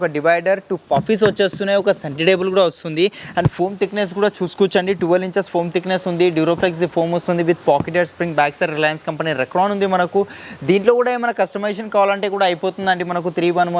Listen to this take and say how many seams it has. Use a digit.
0